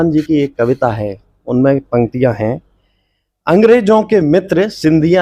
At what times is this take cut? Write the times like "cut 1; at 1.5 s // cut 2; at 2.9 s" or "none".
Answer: none